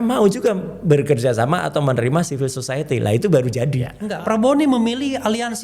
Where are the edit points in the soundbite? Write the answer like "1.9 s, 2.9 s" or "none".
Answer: 4.0 s